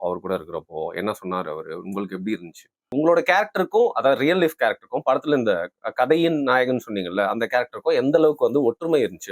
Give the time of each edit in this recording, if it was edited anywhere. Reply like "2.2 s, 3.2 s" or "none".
2.9 s